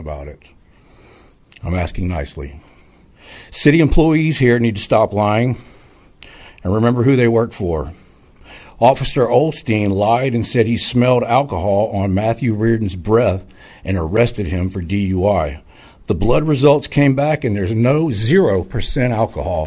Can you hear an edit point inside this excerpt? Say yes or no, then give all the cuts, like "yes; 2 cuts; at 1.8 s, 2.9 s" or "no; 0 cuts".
no; 0 cuts